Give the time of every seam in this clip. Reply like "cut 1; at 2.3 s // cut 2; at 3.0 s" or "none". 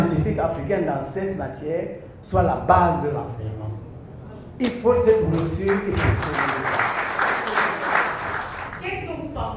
cut 1; at 8.5 s